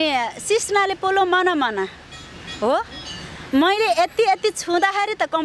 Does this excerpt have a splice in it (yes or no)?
no